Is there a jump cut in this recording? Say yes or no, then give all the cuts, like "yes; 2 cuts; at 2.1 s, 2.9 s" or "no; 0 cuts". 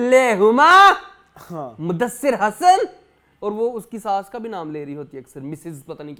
no; 0 cuts